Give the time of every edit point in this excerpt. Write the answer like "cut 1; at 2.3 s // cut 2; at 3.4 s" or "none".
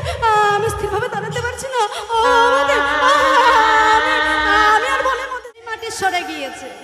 cut 1; at 5.4 s

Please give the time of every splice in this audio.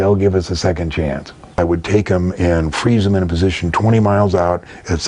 cut 1; at 1.6 s

